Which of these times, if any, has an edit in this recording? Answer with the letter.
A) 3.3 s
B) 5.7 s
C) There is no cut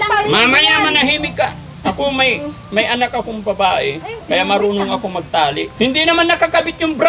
B